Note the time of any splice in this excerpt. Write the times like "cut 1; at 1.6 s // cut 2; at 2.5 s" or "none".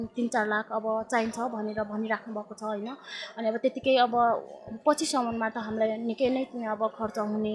none